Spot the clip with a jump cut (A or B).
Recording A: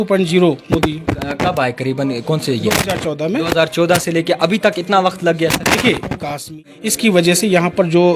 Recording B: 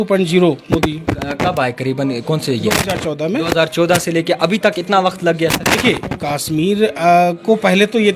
A